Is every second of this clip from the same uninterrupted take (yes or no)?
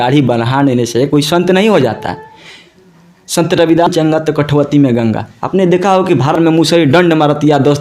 no